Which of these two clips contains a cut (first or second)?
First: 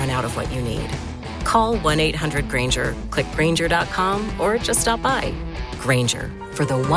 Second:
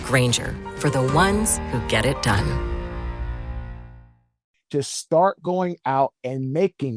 second